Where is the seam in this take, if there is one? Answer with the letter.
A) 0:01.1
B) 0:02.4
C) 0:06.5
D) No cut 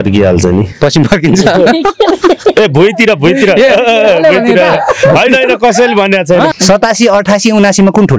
C